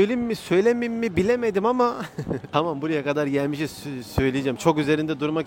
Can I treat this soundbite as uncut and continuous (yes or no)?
yes